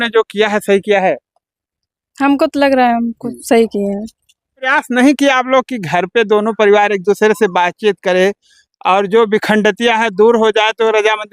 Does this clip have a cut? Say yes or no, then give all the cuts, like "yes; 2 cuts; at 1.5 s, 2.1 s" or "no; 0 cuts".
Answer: yes; 1 cut; at 4.6 s